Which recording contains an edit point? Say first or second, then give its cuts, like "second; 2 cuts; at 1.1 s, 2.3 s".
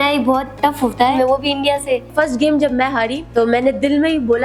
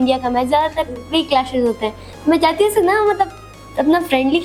first; 3 cuts; at 0.9 s, 2.1 s, 3.2 s